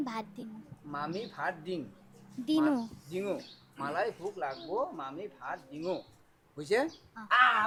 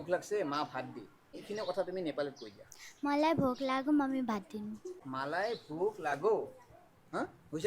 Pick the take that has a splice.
second; 1 cut; at 1.4 s

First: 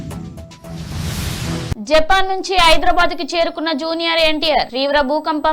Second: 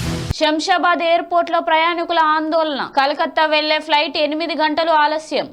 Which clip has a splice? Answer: first; 1 cut; at 1.7 s

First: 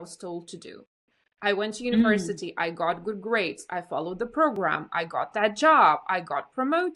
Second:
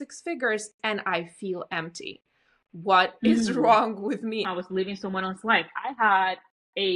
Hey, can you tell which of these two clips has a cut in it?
second; 1 cut; at 4.5 s

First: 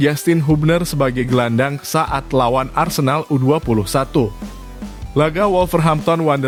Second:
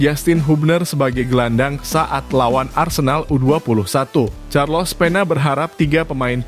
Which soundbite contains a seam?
second; 1 cut; at 4.4 s

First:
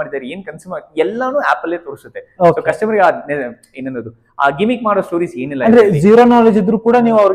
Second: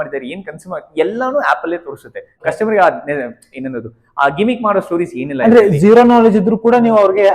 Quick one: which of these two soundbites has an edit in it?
second; 1 cut; at 2.4 s

